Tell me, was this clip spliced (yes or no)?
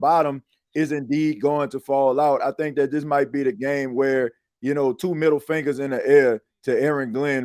no